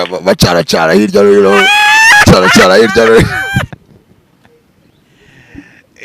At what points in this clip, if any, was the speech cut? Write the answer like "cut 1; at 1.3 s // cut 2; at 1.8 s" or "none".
cut 1; at 3.7 s